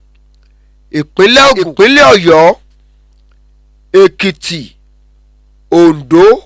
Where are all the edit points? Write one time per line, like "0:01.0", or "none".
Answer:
0:01.7